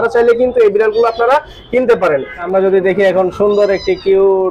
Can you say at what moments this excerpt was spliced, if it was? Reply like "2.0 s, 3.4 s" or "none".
2.3 s